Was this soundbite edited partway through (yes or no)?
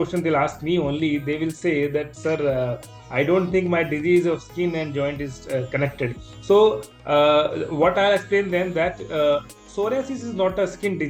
no